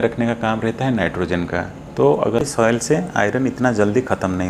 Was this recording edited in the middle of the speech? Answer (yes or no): yes